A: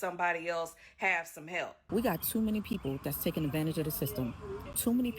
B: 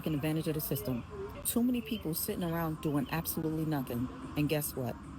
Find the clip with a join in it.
A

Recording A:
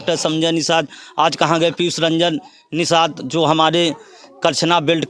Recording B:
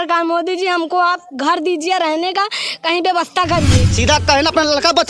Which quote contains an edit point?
B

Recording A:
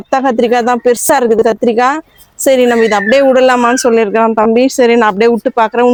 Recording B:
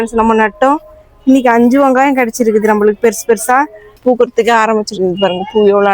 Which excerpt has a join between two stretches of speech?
B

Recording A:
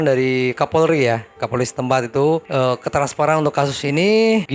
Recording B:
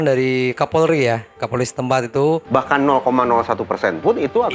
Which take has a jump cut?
B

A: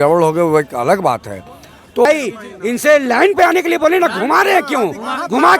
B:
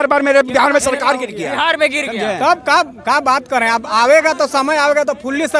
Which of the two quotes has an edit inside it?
A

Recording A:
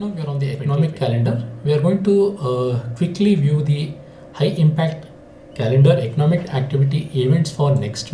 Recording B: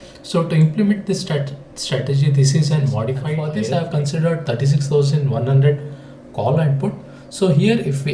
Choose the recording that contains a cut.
B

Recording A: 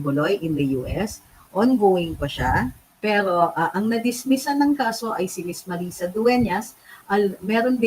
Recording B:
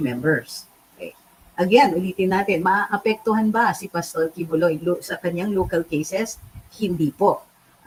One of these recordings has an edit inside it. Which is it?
A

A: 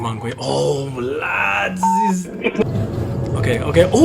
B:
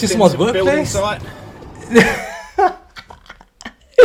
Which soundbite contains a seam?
A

